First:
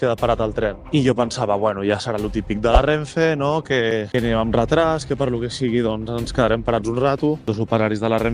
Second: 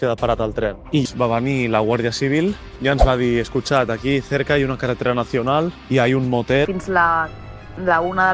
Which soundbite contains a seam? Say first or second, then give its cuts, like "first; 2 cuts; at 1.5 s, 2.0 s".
second; 2 cuts; at 1.0 s, 6.7 s